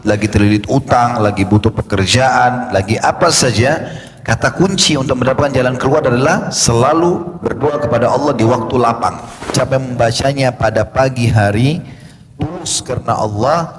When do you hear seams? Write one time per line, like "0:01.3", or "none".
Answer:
0:09.5